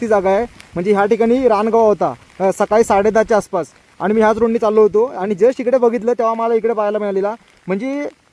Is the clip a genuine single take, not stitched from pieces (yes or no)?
yes